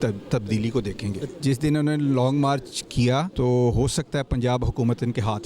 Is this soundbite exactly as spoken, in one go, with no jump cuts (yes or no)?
no